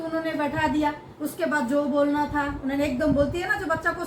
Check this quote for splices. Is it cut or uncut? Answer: uncut